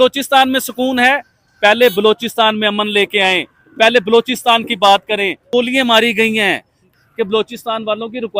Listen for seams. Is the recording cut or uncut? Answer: cut